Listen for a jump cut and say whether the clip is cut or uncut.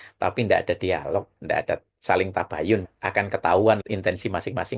cut